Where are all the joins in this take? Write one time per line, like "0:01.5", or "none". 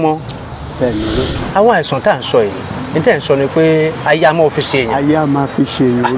0:01.4